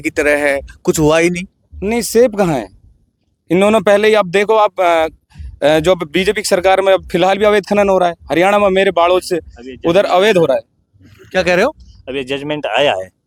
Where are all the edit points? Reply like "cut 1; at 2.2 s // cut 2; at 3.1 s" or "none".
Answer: none